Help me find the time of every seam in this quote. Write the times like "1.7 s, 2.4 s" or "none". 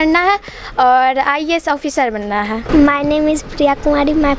none